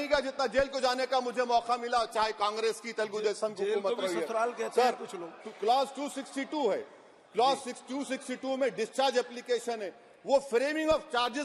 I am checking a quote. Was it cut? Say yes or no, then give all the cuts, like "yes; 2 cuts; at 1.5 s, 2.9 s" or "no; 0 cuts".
no; 0 cuts